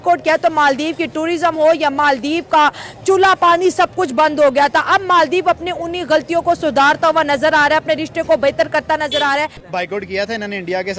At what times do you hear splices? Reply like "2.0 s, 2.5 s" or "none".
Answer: 9.6 s